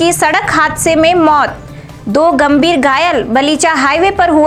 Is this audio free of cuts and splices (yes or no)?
yes